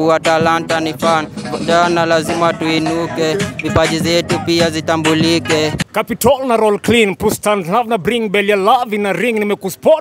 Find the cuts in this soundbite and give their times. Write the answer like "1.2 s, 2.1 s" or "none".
5.8 s